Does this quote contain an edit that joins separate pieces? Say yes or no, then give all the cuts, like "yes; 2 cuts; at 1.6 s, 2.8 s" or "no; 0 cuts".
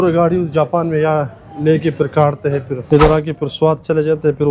yes; 1 cut; at 2.8 s